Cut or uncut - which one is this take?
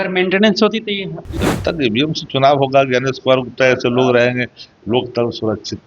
cut